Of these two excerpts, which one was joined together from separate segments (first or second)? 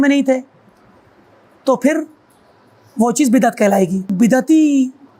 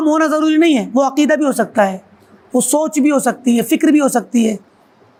first